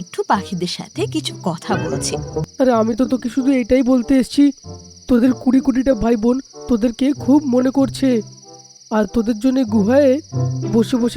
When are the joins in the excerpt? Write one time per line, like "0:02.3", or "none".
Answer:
0:02.5